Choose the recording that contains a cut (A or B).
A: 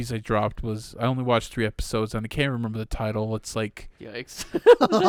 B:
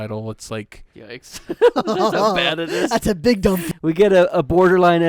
B